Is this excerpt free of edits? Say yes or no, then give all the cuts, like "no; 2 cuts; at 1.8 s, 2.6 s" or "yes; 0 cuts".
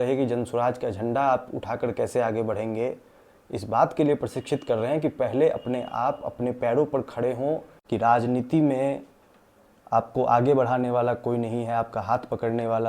no; 1 cut; at 7.7 s